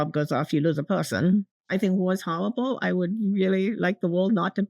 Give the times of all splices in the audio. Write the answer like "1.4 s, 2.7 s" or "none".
1.6 s